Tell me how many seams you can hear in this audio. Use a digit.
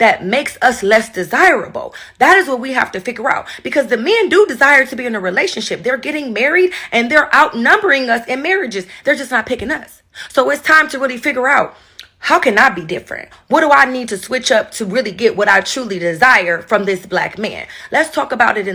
0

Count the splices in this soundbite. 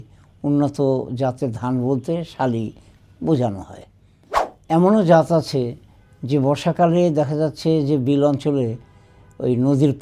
1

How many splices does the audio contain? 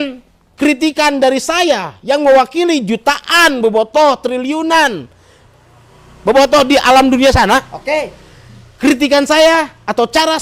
0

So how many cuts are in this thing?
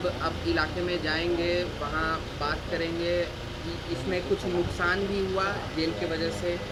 0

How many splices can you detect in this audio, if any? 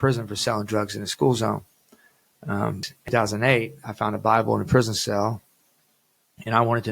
1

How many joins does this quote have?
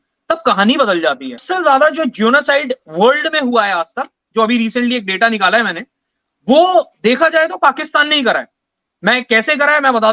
1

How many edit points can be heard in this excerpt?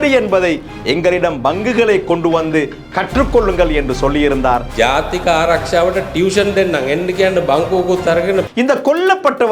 1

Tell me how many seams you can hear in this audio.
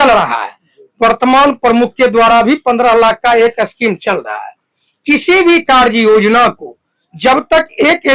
0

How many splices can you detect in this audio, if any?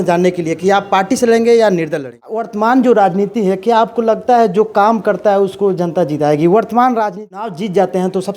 2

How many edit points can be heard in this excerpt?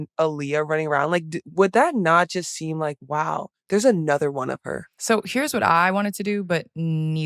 1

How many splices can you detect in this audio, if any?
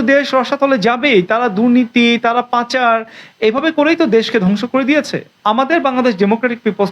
1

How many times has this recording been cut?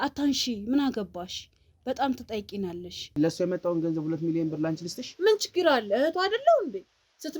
1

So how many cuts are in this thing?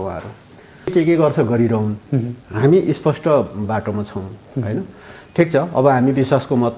1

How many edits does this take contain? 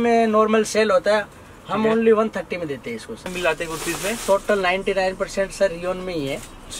1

